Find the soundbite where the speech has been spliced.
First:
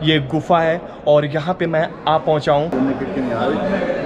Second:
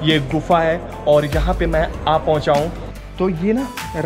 second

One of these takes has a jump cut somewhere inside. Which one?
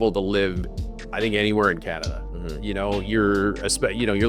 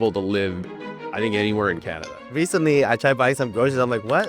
second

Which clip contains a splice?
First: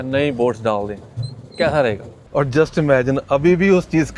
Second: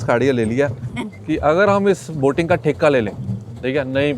first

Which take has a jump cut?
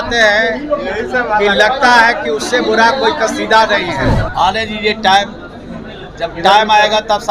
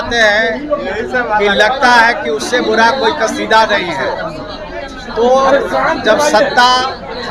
first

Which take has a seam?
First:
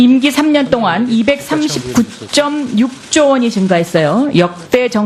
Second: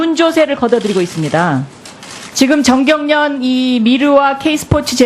second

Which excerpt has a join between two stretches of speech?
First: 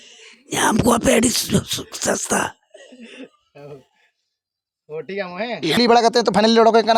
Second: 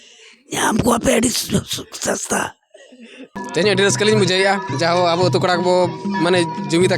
second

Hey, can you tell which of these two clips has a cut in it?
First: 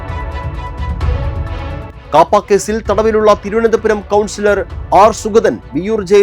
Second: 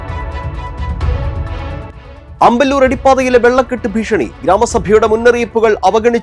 first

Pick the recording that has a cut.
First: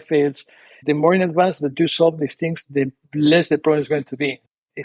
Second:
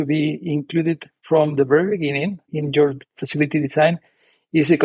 second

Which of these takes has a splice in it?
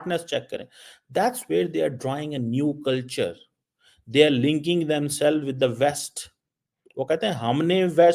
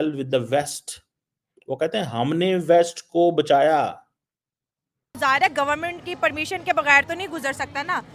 second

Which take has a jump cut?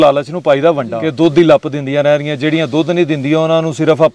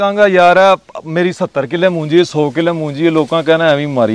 first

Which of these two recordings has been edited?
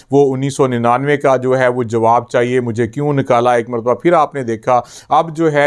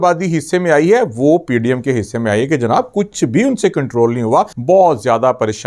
second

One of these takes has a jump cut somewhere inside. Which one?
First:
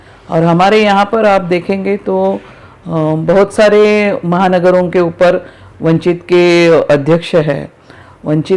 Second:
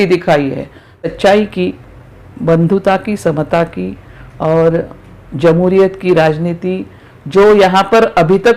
second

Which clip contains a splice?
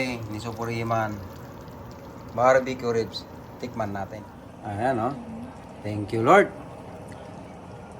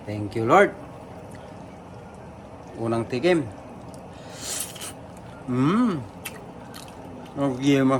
first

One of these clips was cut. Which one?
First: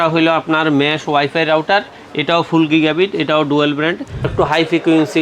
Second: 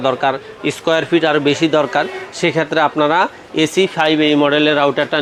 first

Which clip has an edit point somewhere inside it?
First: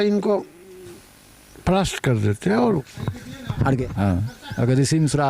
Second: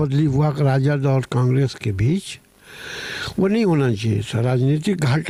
first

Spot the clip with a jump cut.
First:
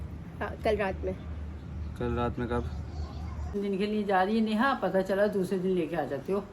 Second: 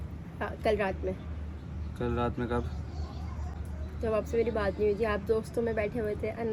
first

